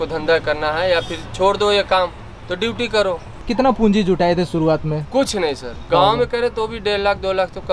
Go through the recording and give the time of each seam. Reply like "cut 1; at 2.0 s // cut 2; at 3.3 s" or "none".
cut 1; at 3.4 s // cut 2; at 5.9 s

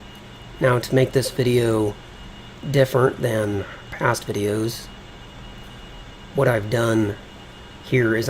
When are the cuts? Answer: cut 1; at 3.3 s

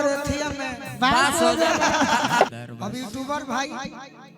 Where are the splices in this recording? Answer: cut 1; at 2.5 s

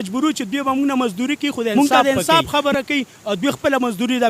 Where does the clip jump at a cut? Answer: cut 1; at 1.7 s

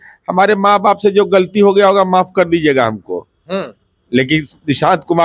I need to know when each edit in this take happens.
none

